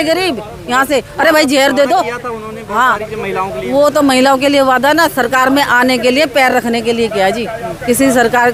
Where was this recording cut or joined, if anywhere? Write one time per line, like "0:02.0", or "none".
none